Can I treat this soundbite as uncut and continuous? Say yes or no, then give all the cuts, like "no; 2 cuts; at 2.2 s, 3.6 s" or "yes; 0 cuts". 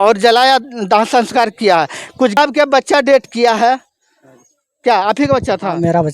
no; 1 cut; at 2.4 s